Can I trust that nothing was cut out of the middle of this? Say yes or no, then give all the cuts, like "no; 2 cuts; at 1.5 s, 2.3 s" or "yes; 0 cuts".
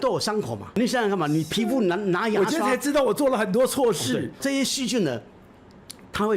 no; 2 cuts; at 0.8 s, 4.4 s